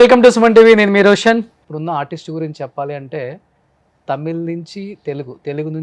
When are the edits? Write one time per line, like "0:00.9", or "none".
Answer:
0:01.6